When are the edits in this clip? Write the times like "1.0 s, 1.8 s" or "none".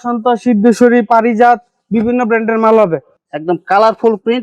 3.2 s

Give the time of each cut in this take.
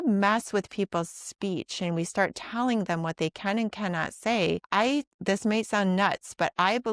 4.6 s

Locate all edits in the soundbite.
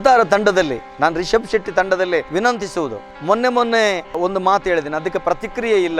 none

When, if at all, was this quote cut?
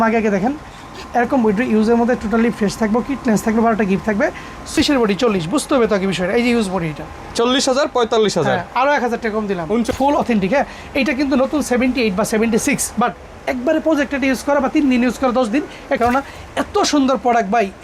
4.8 s, 9.9 s, 16.0 s

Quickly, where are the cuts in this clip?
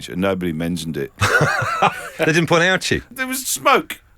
1.1 s, 2.1 s, 3.1 s

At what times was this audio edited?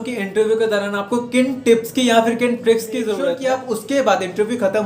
3.1 s

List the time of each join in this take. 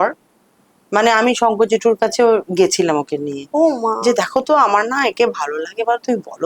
none

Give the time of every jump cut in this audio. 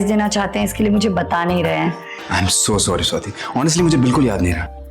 none

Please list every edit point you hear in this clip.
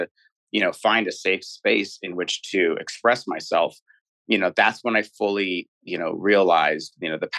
none

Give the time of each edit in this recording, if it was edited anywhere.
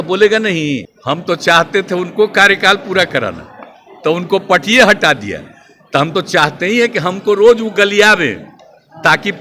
0.9 s

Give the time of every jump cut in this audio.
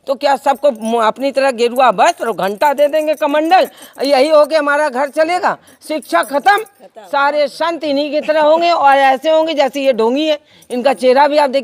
none

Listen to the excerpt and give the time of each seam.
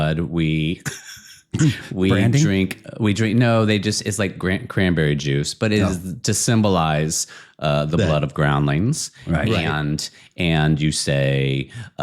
none

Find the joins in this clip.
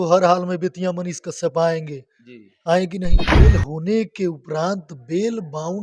3.2 s

